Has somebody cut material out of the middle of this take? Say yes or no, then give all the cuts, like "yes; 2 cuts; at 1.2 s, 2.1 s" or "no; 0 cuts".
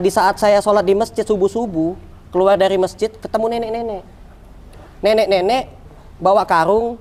no; 0 cuts